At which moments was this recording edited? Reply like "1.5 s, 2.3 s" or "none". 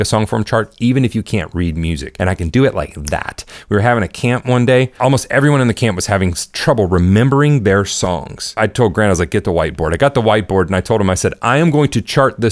2.1 s, 5.0 s, 8.5 s